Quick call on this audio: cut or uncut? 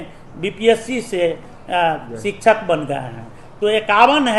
uncut